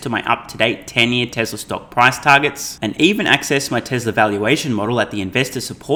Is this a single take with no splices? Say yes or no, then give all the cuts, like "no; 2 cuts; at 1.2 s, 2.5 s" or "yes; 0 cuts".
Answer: yes; 0 cuts